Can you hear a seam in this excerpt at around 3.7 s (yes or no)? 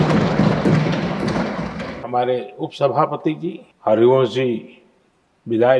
yes